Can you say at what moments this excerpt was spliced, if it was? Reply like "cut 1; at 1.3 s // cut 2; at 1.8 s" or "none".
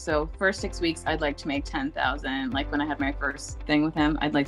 none